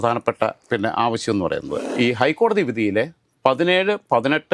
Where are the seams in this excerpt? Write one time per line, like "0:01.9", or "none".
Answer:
0:01.8